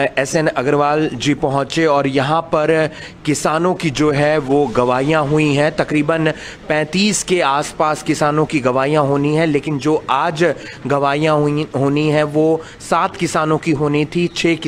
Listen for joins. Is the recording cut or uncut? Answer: uncut